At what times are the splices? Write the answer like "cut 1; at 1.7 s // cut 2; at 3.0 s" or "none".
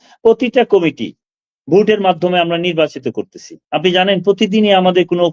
none